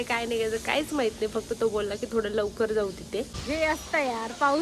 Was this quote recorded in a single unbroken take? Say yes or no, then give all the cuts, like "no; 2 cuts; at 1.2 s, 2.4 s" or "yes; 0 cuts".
no; 1 cut; at 3.4 s